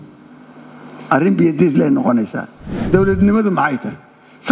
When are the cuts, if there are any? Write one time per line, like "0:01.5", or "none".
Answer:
0:02.9